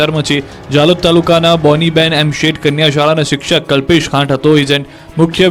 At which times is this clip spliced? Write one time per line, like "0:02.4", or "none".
none